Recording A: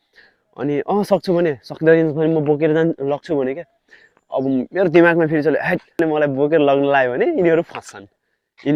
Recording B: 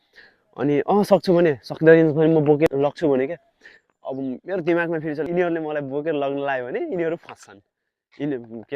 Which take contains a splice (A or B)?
B